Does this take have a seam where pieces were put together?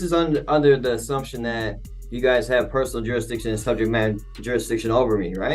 no; 0 cuts

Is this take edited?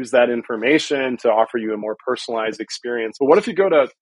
yes; 1 cut; at 3.1 s

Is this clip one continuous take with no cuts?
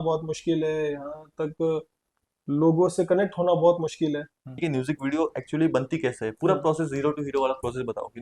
no; 1 cut; at 4.6 s

